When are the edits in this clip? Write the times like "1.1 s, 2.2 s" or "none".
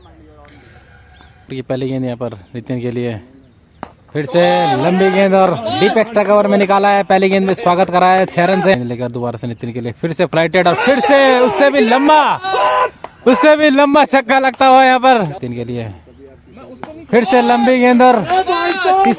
1.5 s, 8.7 s, 15.3 s

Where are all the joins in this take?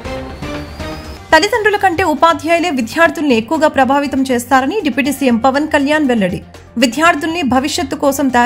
none

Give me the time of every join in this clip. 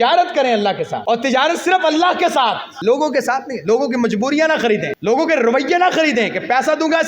1.0 s, 2.7 s, 4.9 s

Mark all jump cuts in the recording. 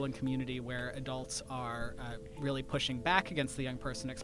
none

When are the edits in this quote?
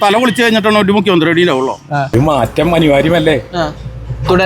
2.1 s

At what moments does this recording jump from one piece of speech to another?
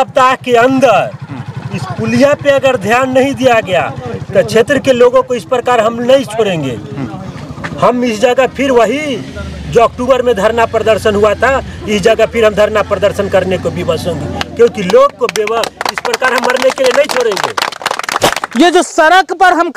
18.4 s

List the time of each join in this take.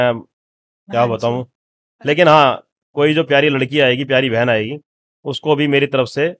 1.9 s

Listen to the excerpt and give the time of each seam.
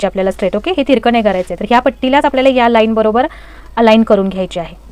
none

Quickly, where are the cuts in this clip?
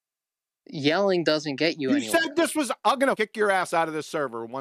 3.2 s

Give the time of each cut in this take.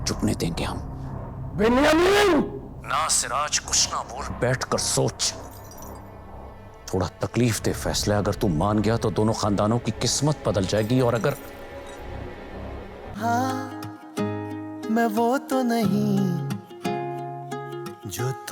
13.1 s

